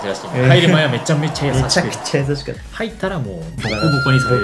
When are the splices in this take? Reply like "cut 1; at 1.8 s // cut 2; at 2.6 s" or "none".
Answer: cut 1; at 3.5 s